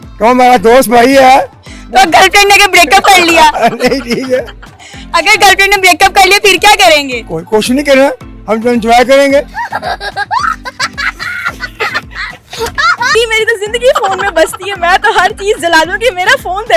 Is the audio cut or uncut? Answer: cut